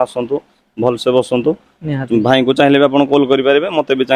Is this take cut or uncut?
uncut